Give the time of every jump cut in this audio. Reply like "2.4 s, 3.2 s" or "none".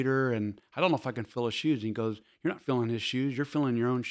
none